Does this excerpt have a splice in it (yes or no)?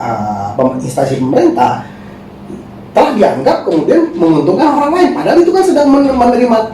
no